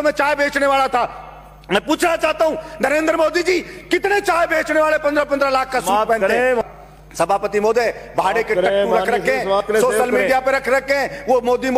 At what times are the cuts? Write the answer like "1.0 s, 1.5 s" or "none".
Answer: 6.6 s